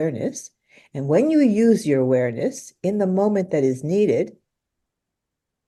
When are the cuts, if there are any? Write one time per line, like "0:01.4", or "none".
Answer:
none